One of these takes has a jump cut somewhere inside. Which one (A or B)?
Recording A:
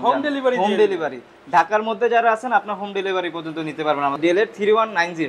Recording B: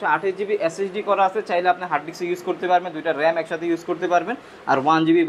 A